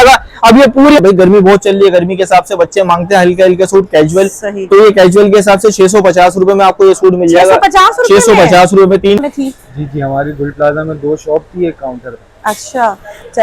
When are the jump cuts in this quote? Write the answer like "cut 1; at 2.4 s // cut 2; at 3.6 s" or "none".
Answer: cut 1; at 1.0 s // cut 2; at 9.2 s

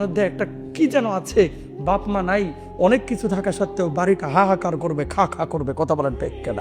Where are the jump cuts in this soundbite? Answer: none

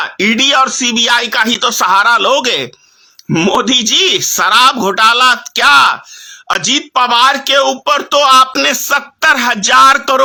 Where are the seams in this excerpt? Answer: none

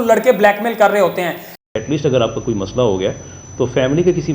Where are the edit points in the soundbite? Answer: cut 1; at 1.5 s

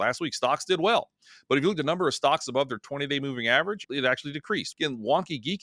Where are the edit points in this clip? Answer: cut 1; at 4.7 s

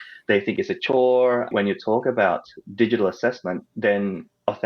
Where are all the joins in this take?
cut 1; at 1.5 s // cut 2; at 3.7 s

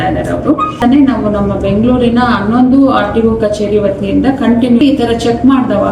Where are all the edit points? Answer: cut 1; at 0.8 s // cut 2; at 4.8 s

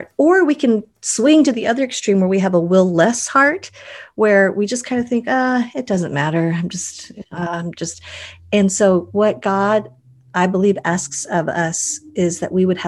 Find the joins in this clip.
none

